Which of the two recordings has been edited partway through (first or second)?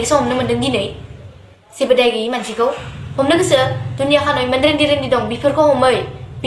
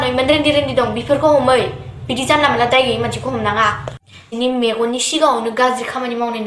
second